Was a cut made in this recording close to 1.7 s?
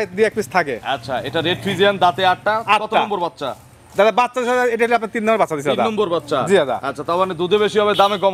no; 0 cuts

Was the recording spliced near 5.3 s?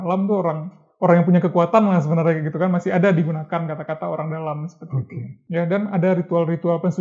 yes; 1 cut; at 5.3 s

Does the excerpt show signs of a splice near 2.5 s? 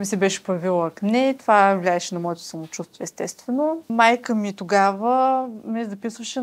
no; 1 cut; at 3.9 s

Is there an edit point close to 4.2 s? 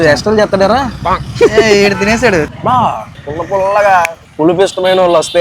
yes; 3 cuts; at 2.5 s, 3.2 s, 4.2 s

